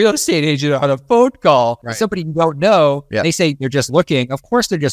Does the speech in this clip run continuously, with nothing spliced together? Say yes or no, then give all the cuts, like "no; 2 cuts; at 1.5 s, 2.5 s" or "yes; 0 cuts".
no; 2 cuts; at 1.8 s, 3.0 s